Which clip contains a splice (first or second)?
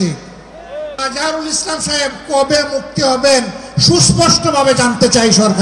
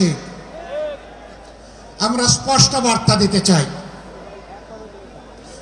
first